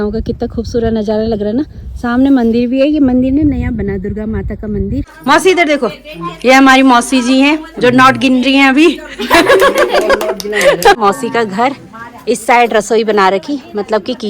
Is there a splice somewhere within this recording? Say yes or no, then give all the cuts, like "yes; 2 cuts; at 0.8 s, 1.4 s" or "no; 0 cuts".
yes; 2 cuts; at 5.1 s, 11.0 s